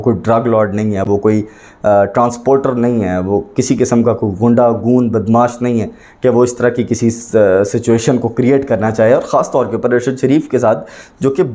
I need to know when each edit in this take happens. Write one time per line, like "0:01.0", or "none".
none